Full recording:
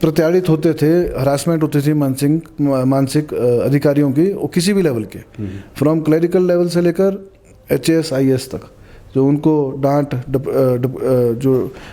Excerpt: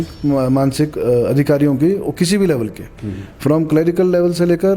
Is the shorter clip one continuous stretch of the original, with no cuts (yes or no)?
yes